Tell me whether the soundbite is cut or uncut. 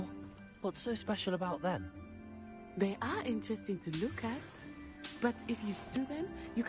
uncut